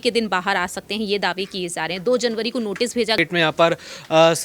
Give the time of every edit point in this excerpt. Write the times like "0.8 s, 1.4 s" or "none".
3.2 s